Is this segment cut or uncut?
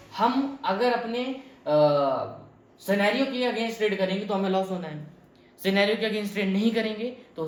uncut